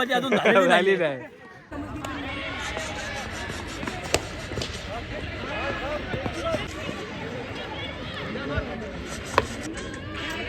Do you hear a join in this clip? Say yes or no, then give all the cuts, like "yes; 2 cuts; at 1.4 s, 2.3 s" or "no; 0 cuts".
no; 0 cuts